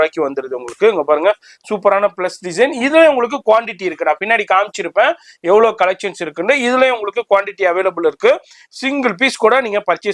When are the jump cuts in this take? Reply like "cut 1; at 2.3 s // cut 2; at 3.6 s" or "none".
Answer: none